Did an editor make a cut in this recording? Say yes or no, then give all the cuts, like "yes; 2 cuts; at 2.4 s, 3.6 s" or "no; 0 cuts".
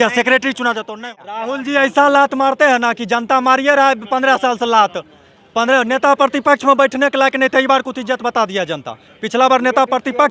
yes; 1 cut; at 1.0 s